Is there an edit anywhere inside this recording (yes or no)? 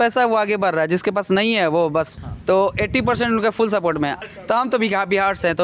yes